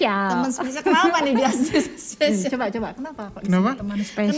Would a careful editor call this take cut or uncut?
uncut